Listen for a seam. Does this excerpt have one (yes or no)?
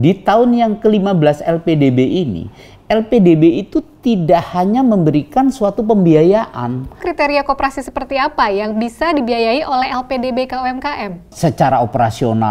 yes